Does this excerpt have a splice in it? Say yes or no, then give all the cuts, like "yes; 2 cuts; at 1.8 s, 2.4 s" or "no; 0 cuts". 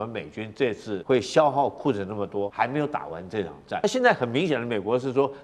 yes; 3 cuts; at 0.9 s, 2.5 s, 3.8 s